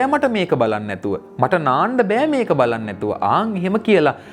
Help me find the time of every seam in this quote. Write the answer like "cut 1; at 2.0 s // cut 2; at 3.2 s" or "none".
none